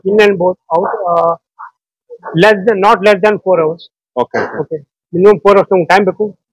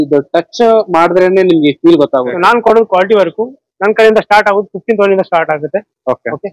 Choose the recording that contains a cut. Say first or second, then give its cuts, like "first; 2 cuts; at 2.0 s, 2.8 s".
second; 1 cut; at 2.3 s